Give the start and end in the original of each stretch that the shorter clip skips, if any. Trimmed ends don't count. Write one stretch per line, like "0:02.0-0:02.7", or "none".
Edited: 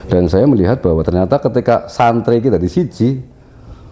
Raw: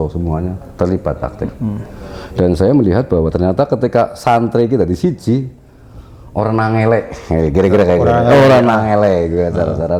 none